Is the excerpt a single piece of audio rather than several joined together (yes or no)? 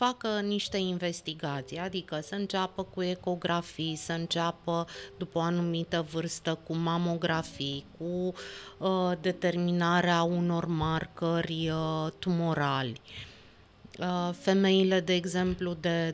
yes